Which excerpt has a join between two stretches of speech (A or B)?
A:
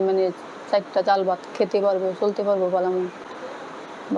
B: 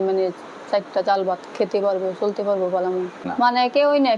B